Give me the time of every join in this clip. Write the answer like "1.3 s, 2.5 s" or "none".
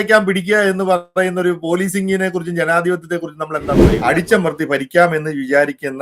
3.9 s

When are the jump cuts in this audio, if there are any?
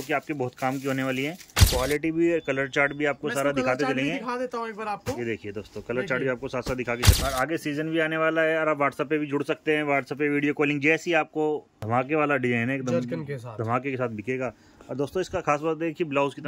1.5 s, 7.1 s, 11.7 s

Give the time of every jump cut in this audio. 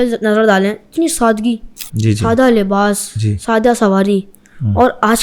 none

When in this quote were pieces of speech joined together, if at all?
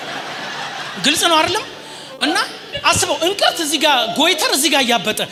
none

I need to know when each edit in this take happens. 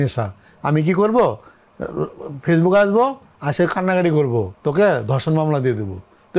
4.5 s

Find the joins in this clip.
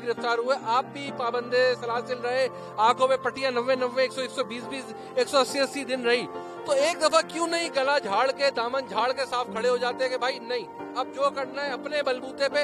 none

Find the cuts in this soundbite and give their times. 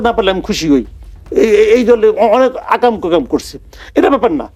none

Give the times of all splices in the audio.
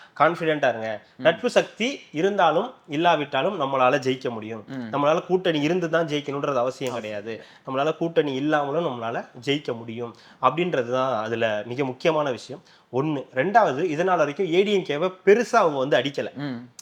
none

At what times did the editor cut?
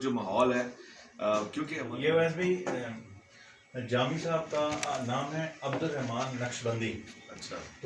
1.8 s

